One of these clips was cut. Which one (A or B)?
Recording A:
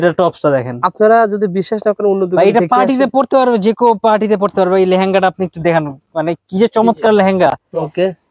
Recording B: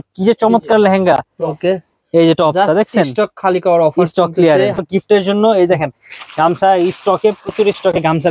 B